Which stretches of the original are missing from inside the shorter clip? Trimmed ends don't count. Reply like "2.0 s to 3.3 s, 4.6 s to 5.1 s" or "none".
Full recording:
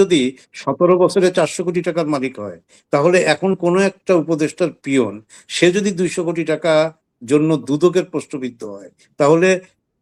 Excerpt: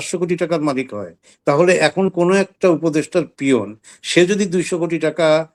none